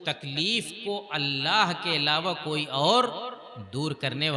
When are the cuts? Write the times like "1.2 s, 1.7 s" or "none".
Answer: none